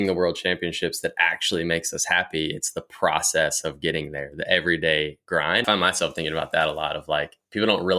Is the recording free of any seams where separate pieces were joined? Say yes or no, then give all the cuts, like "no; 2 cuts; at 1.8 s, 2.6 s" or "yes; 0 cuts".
no; 1 cut; at 5.6 s